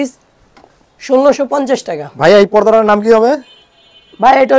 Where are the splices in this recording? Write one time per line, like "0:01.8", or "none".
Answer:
none